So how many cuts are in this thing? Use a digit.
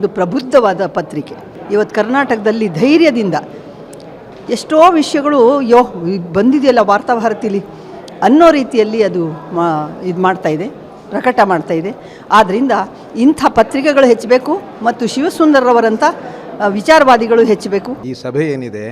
2